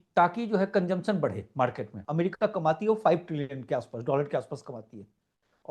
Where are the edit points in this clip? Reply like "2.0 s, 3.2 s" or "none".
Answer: 2.0 s